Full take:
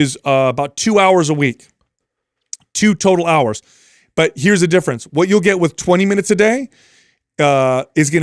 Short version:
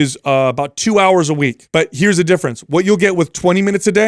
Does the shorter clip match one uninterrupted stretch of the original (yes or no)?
no